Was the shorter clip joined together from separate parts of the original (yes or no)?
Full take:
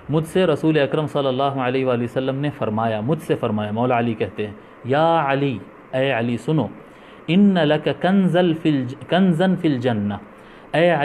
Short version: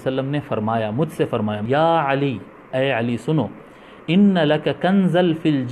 yes